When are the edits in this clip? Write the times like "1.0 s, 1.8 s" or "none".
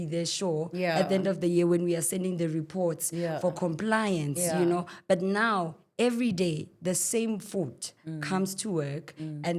none